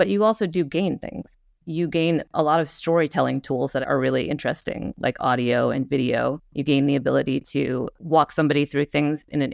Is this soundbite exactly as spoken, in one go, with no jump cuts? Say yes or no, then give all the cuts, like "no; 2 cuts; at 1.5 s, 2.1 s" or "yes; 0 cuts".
no; 3 cuts; at 2.3 s, 3.8 s, 6.5 s